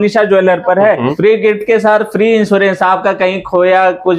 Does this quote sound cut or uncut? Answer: cut